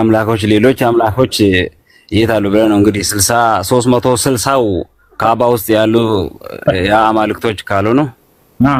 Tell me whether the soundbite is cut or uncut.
uncut